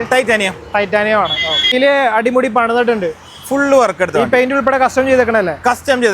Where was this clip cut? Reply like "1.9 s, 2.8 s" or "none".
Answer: 1.7 s